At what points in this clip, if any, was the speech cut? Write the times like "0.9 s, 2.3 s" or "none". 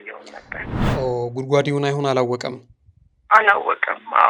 none